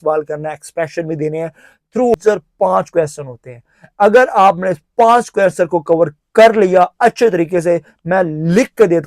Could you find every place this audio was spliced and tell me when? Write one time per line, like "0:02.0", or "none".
0:02.1